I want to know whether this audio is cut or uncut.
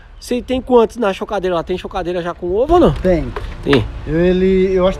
uncut